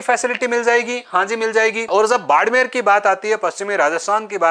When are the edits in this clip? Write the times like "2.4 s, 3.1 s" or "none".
1.9 s